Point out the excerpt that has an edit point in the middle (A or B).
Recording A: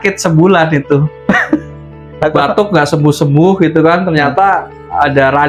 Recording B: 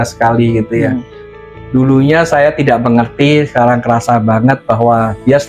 B